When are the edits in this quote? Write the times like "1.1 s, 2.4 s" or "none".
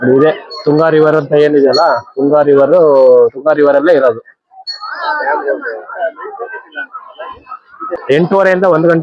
8.0 s